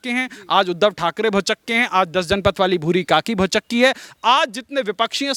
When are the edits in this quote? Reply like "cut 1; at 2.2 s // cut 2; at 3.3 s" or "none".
none